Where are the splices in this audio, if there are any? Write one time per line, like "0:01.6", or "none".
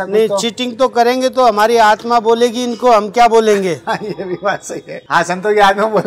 none